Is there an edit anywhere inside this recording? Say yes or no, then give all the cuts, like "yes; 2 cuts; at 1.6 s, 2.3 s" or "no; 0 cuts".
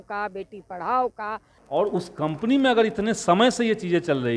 yes; 1 cut; at 1.5 s